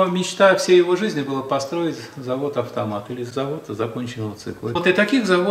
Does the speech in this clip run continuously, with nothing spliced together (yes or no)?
no